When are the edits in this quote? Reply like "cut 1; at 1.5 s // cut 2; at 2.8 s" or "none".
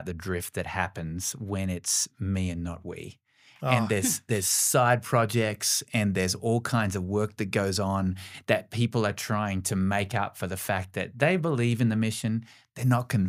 none